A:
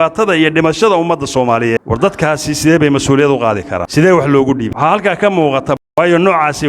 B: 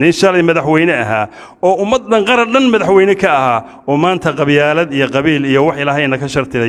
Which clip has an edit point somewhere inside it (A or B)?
A